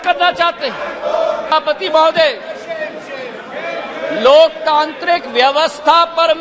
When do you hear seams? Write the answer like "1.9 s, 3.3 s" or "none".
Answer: 1.5 s